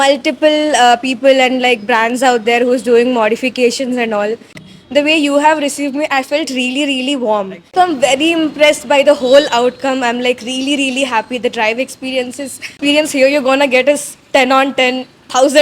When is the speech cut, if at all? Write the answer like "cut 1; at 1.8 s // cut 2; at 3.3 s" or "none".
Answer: cut 1; at 4.6 s // cut 2; at 7.7 s // cut 3; at 12.8 s